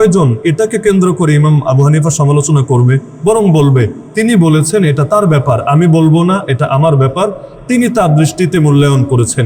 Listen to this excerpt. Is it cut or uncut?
uncut